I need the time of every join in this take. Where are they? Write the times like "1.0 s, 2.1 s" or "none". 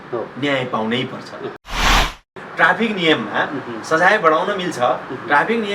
1.9 s

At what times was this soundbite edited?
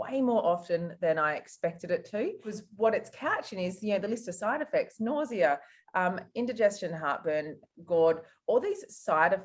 2.5 s

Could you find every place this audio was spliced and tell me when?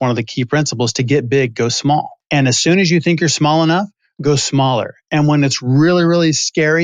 2.2 s

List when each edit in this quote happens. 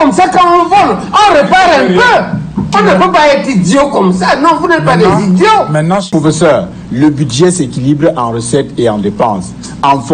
2.7 s, 6.1 s

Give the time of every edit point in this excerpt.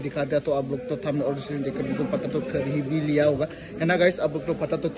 none

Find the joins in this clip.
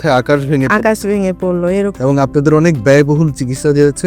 1.9 s

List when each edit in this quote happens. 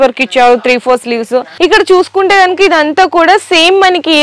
1.5 s

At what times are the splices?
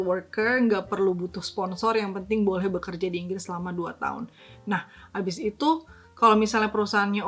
none

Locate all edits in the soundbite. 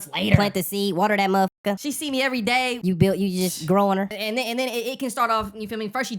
1.8 s, 2.8 s, 4.2 s

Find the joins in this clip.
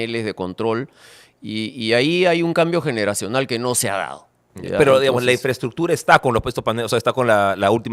none

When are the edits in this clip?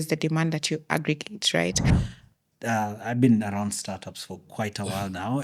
2.0 s

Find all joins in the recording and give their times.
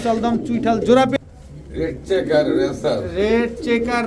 1.1 s

